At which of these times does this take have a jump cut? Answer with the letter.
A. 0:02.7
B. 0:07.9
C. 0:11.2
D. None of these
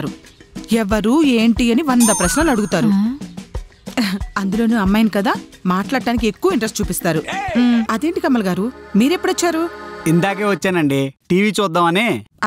B